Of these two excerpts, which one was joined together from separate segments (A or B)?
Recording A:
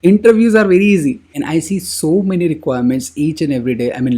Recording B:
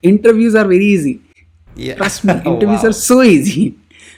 A